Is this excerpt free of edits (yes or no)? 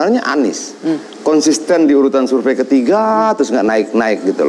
yes